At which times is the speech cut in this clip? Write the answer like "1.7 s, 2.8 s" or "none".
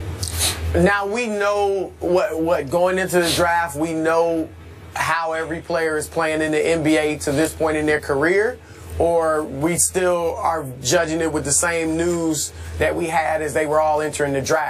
none